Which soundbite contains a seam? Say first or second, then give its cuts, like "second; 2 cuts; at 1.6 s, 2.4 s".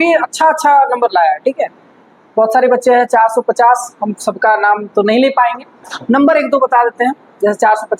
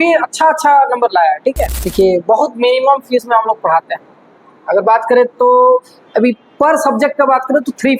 second; 1 cut; at 1.8 s